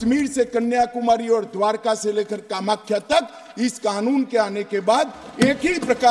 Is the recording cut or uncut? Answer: uncut